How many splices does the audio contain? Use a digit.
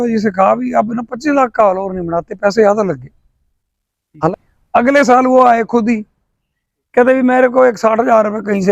1